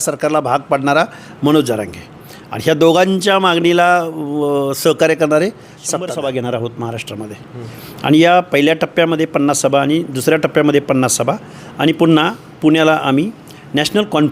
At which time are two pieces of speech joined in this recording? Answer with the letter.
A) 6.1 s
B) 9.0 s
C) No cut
A